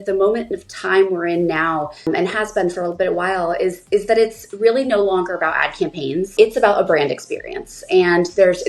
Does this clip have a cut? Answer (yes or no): yes